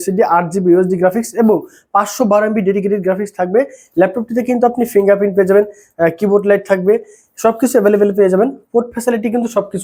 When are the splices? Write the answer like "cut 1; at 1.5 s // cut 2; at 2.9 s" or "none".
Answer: none